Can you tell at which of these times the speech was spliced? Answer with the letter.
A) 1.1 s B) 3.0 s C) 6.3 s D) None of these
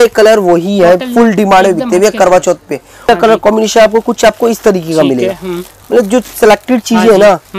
B